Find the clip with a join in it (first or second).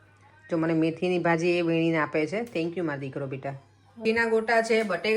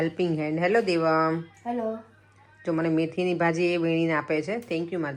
first